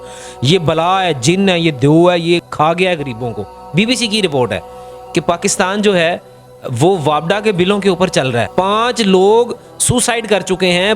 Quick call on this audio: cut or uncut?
cut